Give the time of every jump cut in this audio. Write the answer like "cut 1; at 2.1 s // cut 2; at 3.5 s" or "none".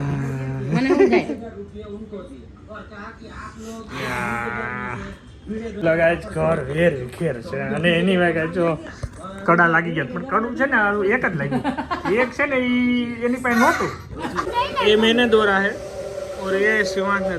cut 1; at 5.8 s // cut 2; at 14.5 s